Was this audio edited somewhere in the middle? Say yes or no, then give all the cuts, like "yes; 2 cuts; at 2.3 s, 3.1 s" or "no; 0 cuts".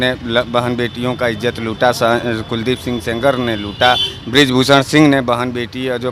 no; 0 cuts